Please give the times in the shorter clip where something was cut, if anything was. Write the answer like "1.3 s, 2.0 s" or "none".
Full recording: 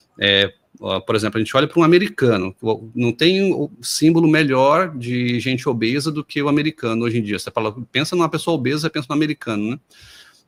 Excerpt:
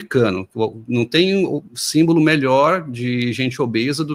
none